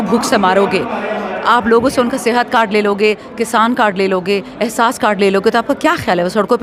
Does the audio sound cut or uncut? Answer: uncut